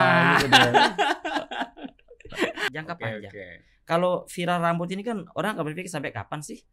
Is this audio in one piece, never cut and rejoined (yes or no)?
no